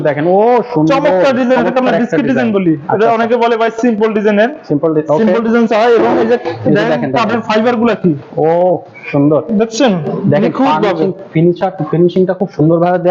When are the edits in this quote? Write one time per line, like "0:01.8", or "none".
none